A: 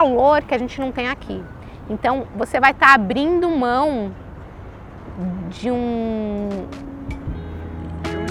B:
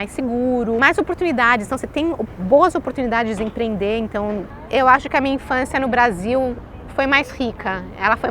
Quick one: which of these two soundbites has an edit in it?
B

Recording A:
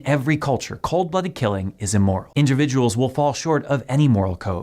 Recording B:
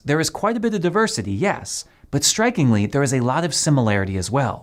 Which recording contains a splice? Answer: A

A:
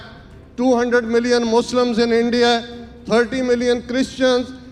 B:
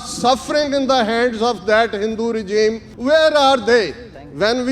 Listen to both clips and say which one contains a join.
B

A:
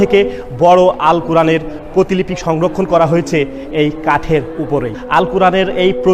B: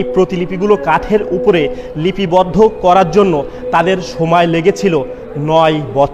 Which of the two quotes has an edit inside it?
A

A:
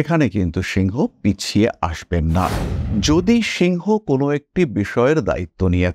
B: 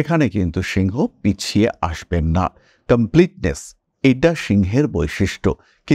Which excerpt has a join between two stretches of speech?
A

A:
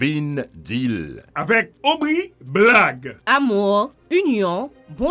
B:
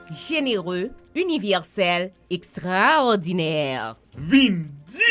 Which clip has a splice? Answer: A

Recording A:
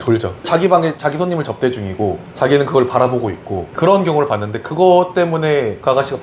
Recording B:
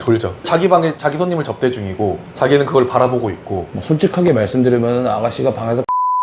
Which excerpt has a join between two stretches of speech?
B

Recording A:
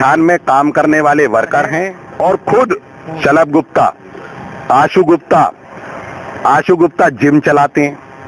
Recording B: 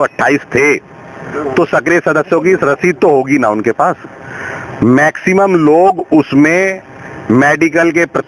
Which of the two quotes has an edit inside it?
A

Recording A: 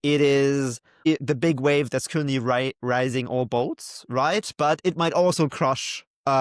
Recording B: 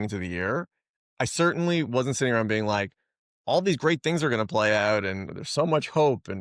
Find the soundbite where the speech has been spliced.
A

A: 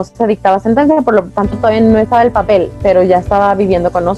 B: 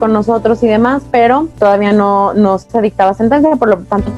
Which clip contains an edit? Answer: B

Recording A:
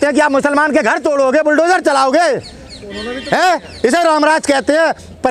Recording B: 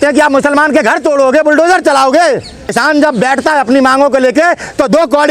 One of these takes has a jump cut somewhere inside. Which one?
B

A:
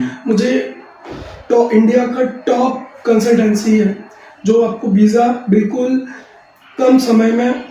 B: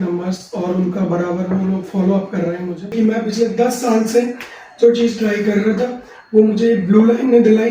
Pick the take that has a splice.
B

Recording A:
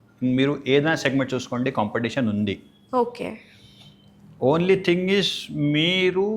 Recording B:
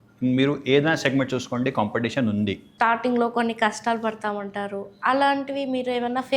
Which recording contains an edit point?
B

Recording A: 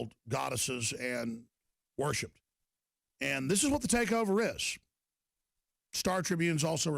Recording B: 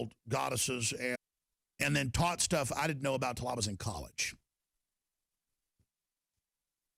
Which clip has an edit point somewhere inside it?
A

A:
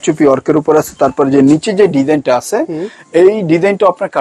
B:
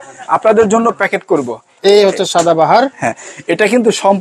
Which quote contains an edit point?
B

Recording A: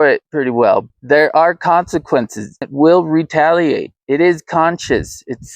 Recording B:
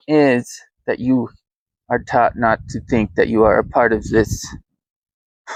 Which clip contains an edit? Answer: A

